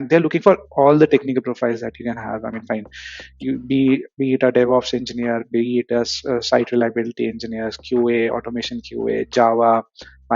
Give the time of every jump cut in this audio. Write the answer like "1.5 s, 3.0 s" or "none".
none